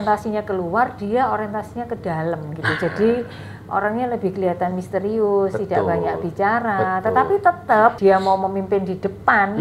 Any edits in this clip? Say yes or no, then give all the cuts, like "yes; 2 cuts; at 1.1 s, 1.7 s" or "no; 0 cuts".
yes; 1 cut; at 8.0 s